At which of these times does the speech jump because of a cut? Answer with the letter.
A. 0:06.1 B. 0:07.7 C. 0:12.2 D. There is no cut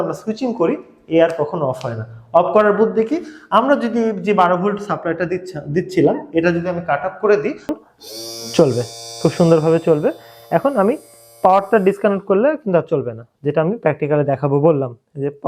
B